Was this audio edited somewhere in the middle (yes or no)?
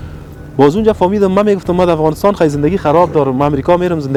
no